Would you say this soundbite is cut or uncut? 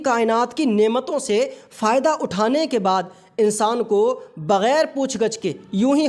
uncut